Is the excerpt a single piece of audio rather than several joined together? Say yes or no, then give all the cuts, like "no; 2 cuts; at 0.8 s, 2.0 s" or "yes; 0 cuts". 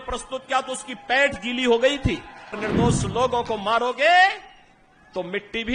no; 1 cut; at 2.6 s